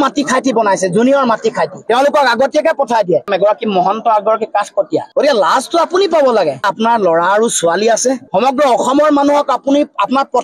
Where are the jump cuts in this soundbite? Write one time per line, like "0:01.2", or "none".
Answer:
0:03.3
0:05.1